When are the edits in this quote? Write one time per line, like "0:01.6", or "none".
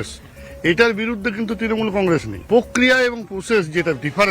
0:02.3